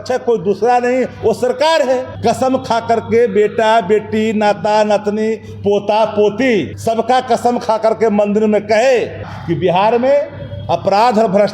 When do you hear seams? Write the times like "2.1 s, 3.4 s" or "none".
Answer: 2.1 s, 6.7 s, 9.3 s